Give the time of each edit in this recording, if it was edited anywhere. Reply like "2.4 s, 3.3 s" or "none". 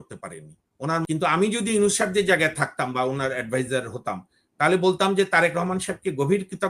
1.1 s